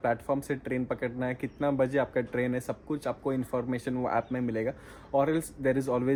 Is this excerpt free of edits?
yes; 0 cuts

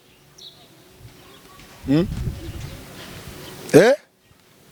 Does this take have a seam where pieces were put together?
no; 0 cuts

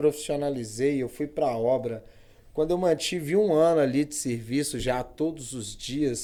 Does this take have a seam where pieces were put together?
no; 0 cuts

